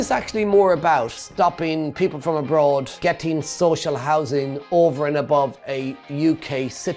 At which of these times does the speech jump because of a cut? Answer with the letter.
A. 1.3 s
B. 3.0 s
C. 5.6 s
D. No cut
D